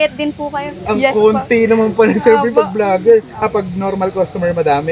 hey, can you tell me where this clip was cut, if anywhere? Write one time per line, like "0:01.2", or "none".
none